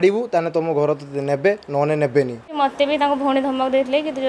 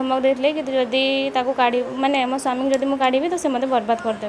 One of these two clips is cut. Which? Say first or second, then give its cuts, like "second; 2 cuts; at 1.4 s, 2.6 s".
first; 1 cut; at 2.5 s